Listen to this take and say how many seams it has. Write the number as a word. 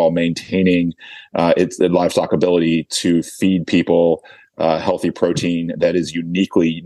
zero